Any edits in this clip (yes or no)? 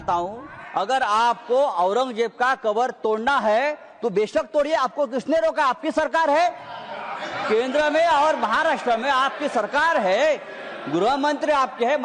no